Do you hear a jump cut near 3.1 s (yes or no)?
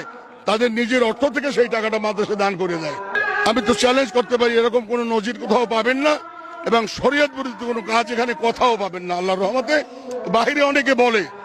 yes